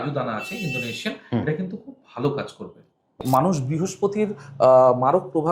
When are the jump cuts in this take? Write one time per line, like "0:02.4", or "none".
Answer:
0:03.2